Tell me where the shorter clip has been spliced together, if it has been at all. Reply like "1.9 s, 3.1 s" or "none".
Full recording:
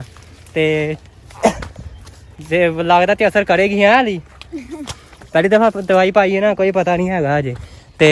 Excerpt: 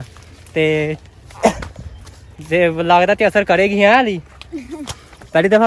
none